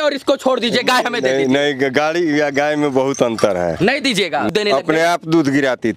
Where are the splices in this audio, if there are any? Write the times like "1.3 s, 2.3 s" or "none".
4.5 s